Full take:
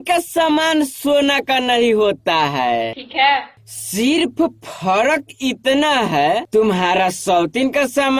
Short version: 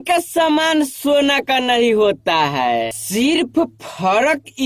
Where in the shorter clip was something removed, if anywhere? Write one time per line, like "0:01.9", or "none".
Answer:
0:03.0